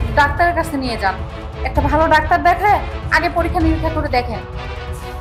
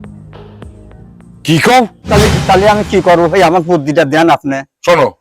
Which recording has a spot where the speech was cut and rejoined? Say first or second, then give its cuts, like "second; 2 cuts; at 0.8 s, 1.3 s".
second; 1 cut; at 2.0 s